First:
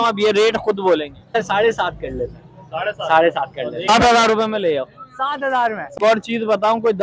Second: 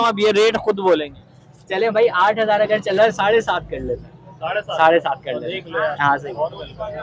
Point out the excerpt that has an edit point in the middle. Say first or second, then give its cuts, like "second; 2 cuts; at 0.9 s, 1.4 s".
first; 3 cuts; at 1.4 s, 3.9 s, 5.9 s